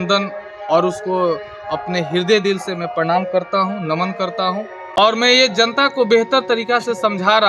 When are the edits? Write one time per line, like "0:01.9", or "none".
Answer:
0:05.0